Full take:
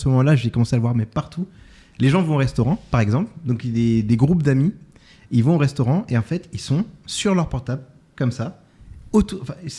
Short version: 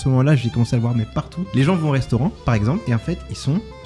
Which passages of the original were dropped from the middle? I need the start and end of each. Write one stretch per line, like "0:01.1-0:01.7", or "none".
0:01.4-0:01.8
0:03.3-0:06.1